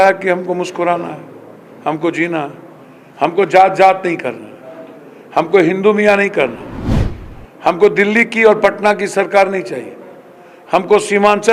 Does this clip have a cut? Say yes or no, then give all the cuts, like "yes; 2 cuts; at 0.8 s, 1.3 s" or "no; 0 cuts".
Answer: no; 0 cuts